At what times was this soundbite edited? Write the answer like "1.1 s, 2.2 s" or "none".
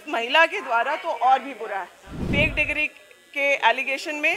2.2 s